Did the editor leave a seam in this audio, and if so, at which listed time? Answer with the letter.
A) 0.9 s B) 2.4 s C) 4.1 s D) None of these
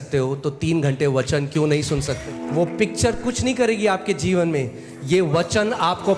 B